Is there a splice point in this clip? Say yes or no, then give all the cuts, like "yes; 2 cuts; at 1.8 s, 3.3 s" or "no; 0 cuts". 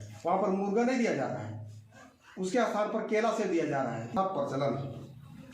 yes; 1 cut; at 4.1 s